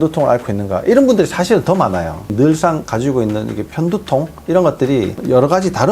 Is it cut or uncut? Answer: cut